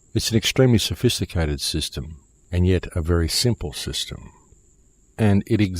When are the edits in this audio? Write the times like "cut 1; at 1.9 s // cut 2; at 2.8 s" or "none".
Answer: cut 1; at 3.7 s